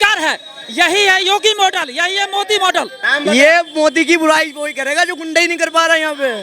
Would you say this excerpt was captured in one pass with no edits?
no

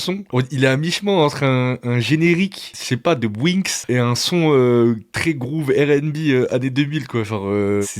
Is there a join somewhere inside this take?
yes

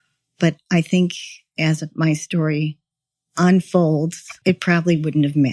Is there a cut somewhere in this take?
yes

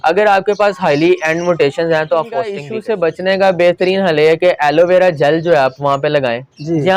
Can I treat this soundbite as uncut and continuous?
no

